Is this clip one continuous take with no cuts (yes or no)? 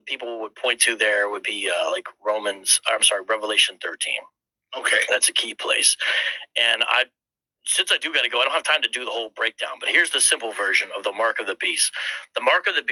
yes